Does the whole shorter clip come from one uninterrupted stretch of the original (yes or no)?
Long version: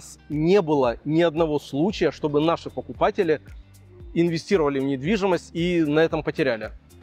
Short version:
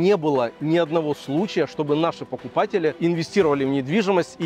no